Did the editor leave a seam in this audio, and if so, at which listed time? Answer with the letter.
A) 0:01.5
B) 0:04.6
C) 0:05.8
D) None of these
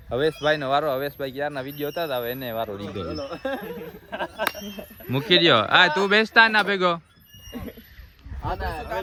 D